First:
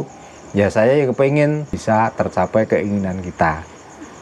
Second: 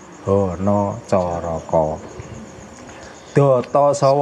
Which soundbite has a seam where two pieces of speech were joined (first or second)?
first